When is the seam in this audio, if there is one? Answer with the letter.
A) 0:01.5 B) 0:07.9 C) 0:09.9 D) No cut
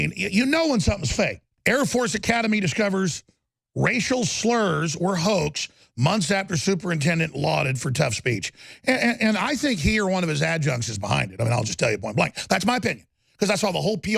A